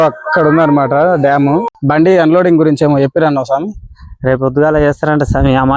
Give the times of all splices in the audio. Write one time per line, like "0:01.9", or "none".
0:01.7